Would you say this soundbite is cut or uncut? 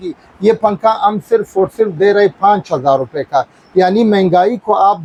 uncut